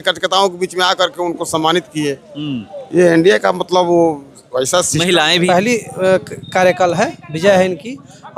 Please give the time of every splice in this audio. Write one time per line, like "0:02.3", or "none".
0:05.5